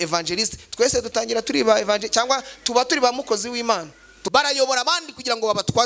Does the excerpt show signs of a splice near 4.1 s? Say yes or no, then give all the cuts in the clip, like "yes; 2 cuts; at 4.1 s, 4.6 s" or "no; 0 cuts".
yes; 1 cut; at 4.1 s